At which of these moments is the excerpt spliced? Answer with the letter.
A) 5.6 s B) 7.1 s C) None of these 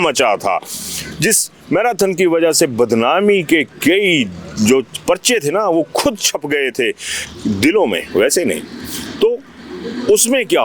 C